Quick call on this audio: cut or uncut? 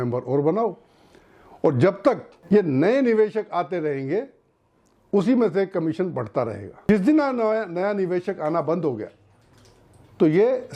cut